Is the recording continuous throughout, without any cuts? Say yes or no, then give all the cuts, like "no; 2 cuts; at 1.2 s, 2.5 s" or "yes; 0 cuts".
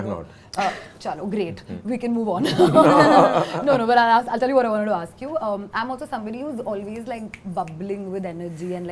yes; 0 cuts